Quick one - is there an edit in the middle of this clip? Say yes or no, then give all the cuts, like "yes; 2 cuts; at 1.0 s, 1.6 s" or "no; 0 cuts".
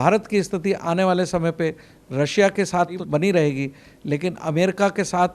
yes; 1 cut; at 3.0 s